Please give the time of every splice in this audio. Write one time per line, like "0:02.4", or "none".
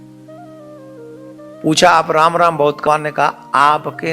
0:02.9